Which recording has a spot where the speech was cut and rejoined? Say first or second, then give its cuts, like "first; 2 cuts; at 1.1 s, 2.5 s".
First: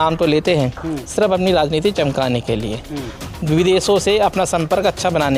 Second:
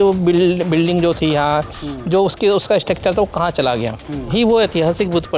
second; 1 cut; at 4.3 s